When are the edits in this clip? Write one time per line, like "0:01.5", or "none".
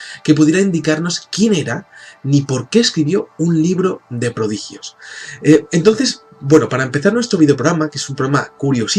none

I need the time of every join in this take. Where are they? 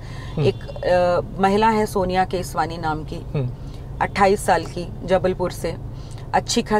none

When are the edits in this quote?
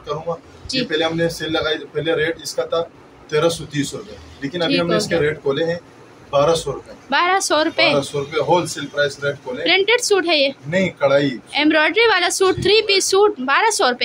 none

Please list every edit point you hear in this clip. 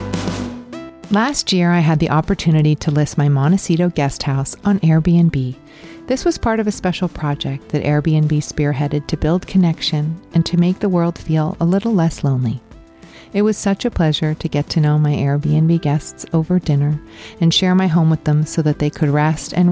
0:00.9

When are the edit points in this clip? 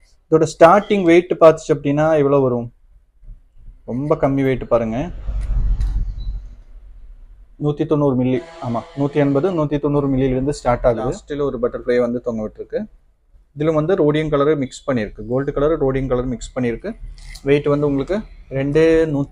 0:11.2

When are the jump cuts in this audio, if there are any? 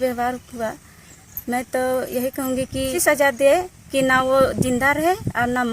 0:03.0

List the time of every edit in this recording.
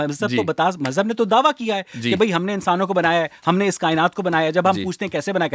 none

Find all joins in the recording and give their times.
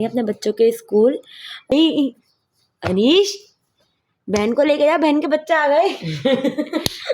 0:01.7

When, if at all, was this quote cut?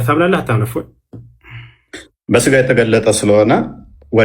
none

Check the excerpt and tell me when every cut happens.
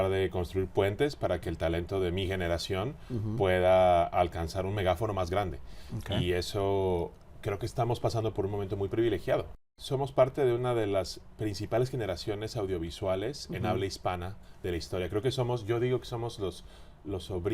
0:09.6

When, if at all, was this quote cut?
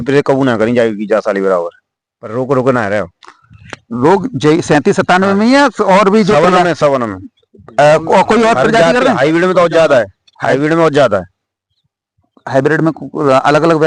none

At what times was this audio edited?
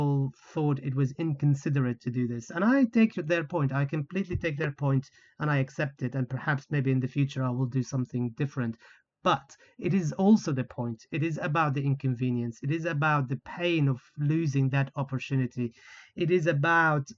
none

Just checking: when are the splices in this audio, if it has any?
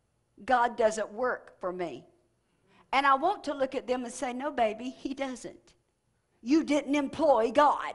none

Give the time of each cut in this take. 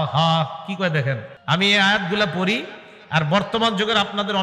0:01.3

